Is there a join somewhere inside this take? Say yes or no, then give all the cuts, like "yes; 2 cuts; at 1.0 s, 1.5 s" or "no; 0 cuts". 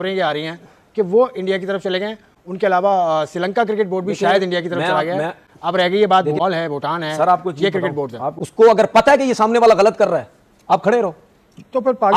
no; 0 cuts